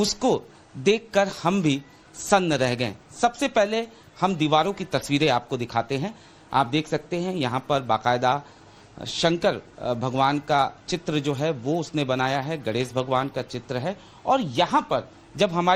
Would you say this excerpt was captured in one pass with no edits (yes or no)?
yes